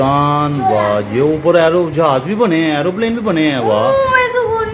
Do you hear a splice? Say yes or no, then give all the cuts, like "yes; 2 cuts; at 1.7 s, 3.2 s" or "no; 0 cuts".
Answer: no; 0 cuts